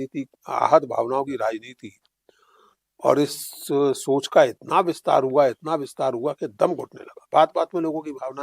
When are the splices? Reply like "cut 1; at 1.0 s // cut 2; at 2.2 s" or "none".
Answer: cut 1; at 7.3 s